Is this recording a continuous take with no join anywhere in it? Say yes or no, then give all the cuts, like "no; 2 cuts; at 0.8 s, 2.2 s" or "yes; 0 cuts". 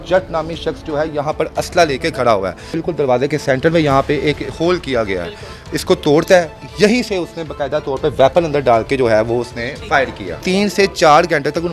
no; 3 cuts; at 2.7 s, 6.6 s, 10.4 s